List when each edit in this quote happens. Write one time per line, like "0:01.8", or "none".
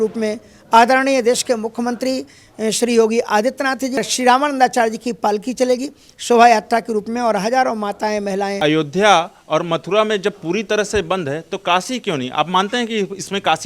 0:04.0
0:08.6